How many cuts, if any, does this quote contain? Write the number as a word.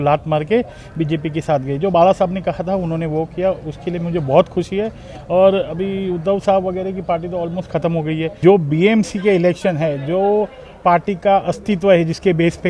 one